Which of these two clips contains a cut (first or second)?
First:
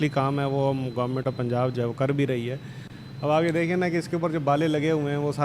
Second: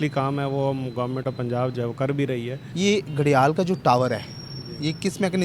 second